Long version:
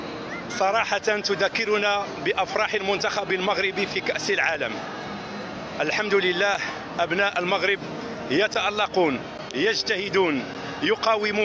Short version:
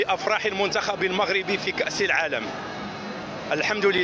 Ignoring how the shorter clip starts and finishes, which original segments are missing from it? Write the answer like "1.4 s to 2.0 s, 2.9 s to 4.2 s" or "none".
none

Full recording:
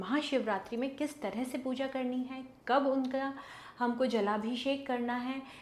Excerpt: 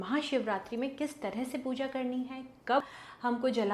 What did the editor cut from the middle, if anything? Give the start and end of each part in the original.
2.8 s to 3.4 s

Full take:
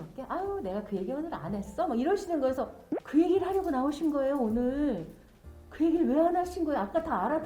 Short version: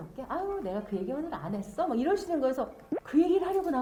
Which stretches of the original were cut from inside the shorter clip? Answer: none

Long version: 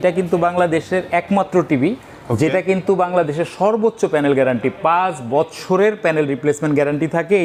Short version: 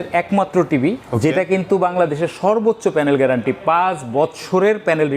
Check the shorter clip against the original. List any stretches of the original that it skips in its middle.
2.0 s to 2.2 s

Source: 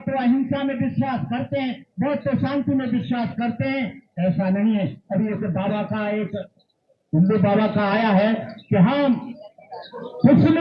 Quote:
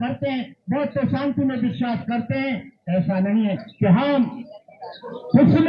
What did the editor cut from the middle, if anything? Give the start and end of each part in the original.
5.0 s to 8.6 s

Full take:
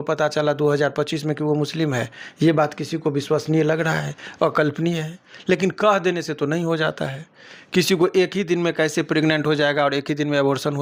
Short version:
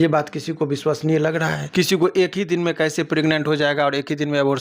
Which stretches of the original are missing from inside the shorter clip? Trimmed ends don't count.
4.1 s to 7.6 s

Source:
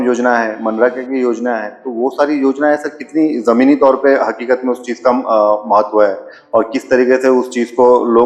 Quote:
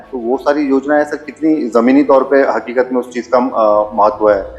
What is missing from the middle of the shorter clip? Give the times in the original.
none

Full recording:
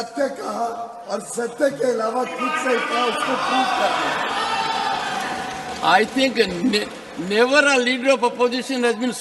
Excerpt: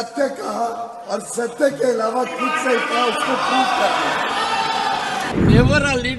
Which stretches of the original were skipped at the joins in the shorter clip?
5.3 s to 7.1 s

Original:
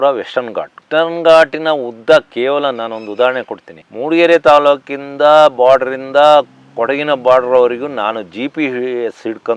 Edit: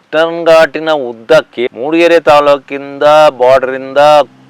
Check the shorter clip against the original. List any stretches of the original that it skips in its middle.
2.4 s to 3.8 s

